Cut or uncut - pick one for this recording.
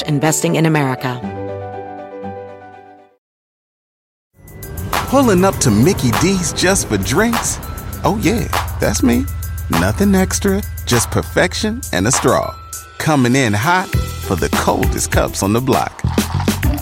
cut